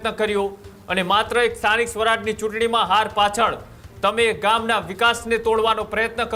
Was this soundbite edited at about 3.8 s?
no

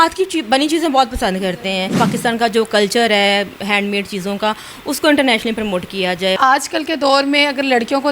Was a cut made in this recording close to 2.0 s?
yes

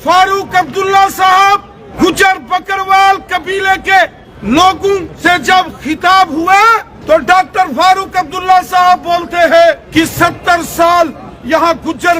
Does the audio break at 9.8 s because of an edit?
yes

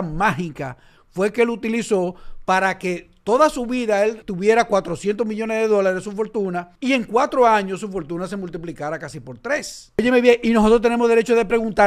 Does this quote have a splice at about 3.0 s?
no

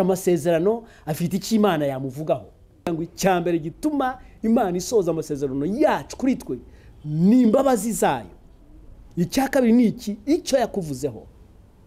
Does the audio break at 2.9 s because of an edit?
yes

